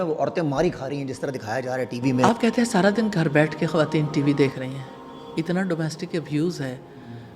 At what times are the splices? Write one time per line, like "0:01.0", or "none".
0:02.2